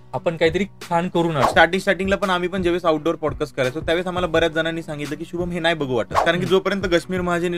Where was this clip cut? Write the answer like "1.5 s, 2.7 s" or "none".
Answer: 1.4 s, 6.1 s